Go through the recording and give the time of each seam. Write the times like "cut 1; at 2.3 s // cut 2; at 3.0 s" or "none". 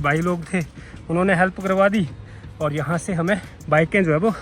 cut 1; at 3.5 s